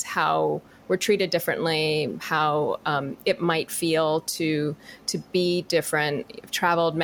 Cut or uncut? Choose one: uncut